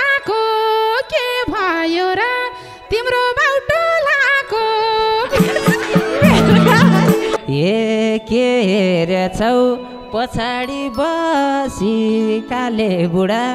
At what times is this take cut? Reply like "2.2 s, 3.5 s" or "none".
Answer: 7.3 s